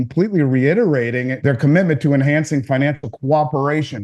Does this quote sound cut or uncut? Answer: cut